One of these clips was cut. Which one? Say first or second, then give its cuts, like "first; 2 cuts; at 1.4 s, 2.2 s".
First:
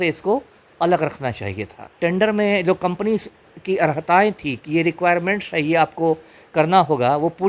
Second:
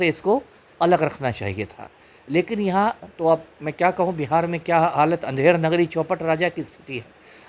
first; 1 cut; at 2.0 s